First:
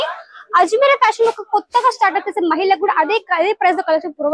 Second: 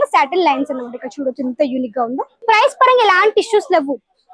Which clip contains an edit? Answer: second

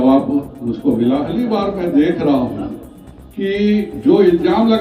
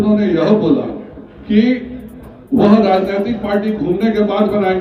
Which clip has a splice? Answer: first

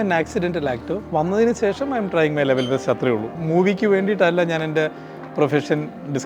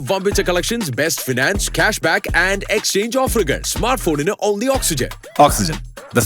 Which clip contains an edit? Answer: first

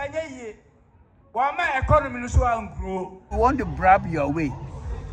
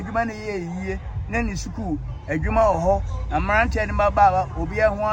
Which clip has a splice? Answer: first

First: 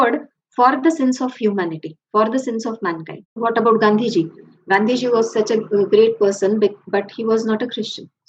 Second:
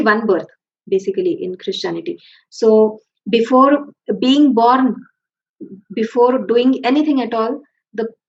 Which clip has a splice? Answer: first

